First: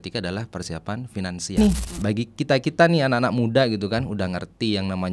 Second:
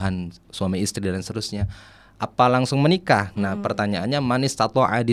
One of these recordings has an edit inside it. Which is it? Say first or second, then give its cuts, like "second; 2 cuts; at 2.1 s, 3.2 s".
first; 1 cut; at 1.6 s